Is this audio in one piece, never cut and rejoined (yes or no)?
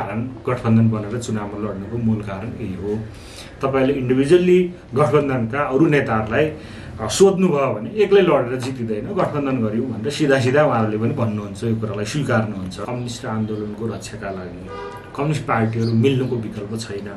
no